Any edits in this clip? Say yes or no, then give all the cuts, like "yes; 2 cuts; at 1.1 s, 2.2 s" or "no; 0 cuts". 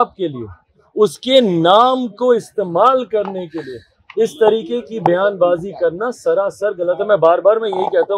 no; 0 cuts